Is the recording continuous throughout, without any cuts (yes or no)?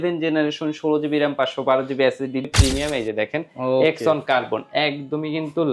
no